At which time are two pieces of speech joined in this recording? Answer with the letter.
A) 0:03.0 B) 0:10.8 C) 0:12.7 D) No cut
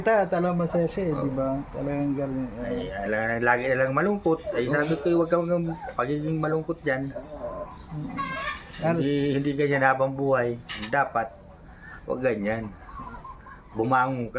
B